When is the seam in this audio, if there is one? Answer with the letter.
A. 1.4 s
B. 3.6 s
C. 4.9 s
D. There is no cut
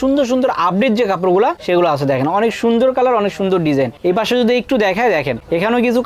D